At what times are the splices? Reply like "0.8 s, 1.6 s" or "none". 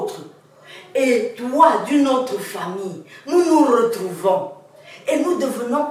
none